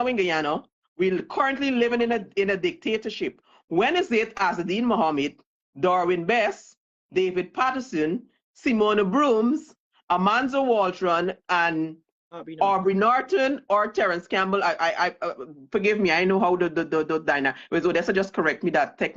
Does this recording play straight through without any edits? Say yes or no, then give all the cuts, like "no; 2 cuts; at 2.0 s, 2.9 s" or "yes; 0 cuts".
yes; 0 cuts